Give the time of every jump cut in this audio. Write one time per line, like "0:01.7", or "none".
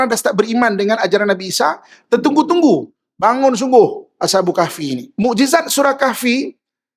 0:05.0